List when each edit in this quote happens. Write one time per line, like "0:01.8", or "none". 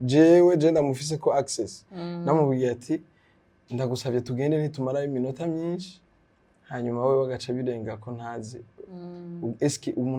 none

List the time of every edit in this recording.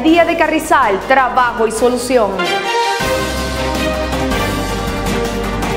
0:02.4

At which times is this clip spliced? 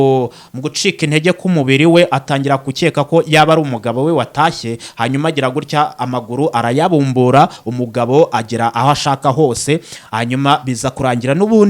none

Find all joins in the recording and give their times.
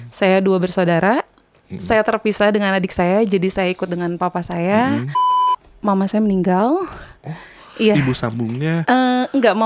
0:05.5

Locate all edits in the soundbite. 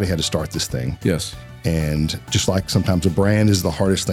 none

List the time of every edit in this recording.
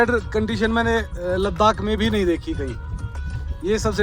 none

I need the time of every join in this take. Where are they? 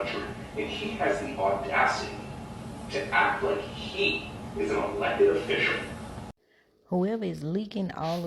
0:06.4

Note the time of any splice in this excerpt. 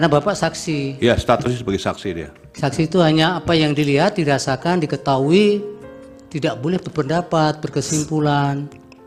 none

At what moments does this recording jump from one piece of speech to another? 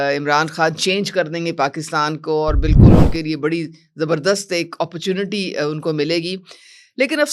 none

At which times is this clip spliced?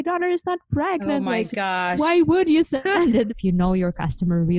0:03.3

